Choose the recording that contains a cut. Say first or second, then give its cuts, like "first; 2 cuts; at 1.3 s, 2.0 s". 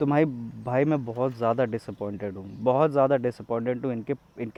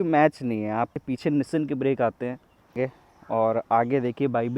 second; 2 cuts; at 1.0 s, 2.7 s